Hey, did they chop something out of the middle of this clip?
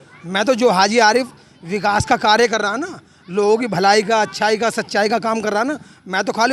no; 0 cuts

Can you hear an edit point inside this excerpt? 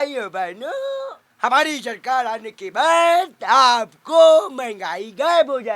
yes; 1 cut; at 1.2 s

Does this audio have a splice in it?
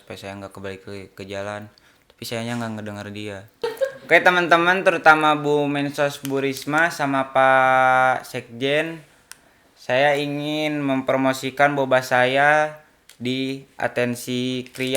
yes; 1 cut; at 3.8 s

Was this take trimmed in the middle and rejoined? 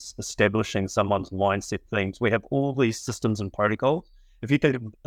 no; 0 cuts

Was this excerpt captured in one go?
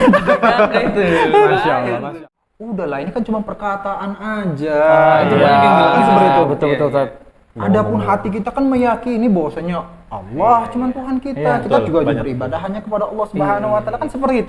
no; 1 cut; at 2.0 s

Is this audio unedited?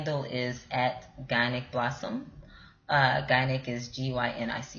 yes; 0 cuts

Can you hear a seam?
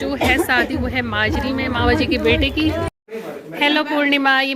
yes; 1 cut; at 2.9 s

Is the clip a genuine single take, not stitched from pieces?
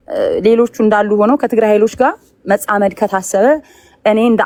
yes; 0 cuts

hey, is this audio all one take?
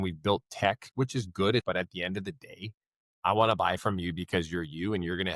no; 1 cut; at 1.6 s

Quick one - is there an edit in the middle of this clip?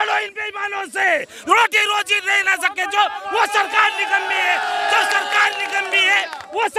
no; 0 cuts

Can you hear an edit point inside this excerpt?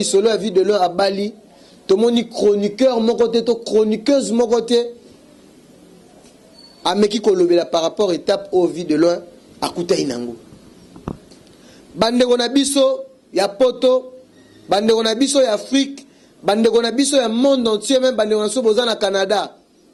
no; 0 cuts

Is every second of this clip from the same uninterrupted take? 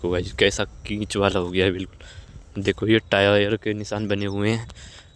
yes; 0 cuts

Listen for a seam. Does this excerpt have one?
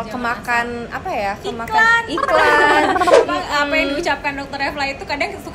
yes; 1 cut; at 3.2 s

